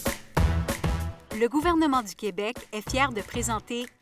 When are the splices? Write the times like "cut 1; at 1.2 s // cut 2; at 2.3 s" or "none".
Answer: cut 1; at 1.1 s